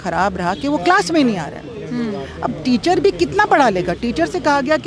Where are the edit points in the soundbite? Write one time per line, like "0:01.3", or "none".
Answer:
none